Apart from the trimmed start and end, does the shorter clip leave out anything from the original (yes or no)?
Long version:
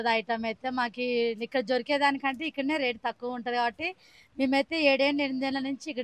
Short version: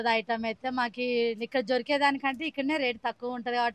no